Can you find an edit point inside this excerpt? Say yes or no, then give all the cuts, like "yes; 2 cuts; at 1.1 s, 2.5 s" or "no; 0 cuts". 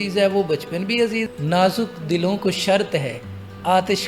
yes; 1 cut; at 1.3 s